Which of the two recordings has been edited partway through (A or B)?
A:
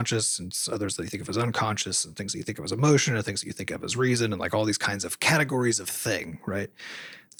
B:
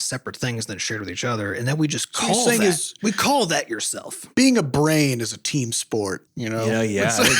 B